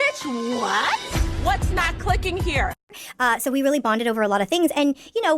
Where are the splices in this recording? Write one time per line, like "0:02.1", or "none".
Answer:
0:02.8